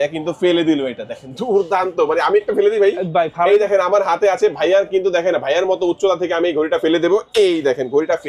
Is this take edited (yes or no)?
no